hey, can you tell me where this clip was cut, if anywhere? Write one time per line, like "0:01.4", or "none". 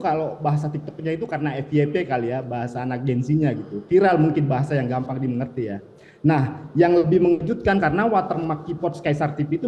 none